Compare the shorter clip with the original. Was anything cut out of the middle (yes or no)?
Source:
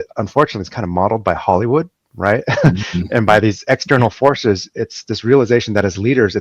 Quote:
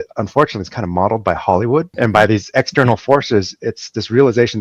yes